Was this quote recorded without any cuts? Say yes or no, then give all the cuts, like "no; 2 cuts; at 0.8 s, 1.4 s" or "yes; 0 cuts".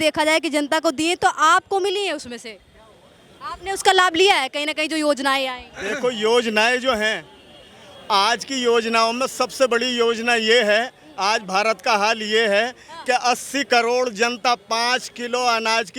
yes; 0 cuts